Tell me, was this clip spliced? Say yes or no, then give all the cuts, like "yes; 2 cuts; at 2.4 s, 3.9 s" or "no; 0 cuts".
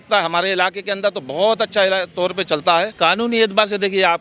yes; 1 cut; at 2.9 s